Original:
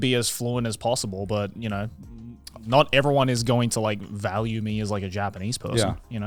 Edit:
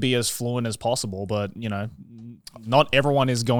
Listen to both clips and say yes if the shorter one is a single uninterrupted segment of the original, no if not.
yes